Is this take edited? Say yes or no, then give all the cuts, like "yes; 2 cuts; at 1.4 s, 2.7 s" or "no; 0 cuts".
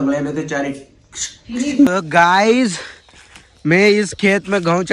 yes; 1 cut; at 1.9 s